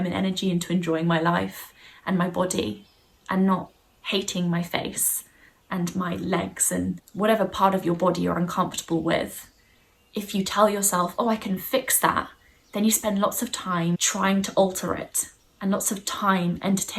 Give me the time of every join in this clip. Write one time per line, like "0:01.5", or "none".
0:07.1
0:14.0